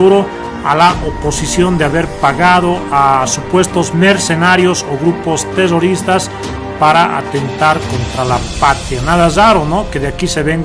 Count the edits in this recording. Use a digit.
1